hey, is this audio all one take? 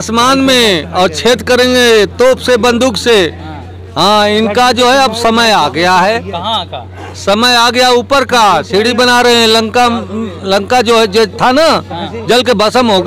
yes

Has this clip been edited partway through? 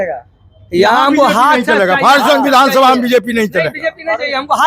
no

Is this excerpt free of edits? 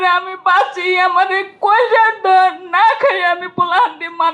yes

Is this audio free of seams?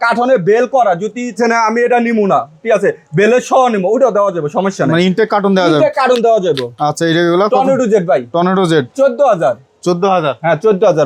yes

